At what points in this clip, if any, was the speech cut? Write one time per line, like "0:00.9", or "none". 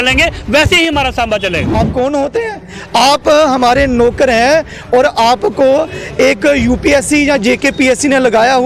0:01.6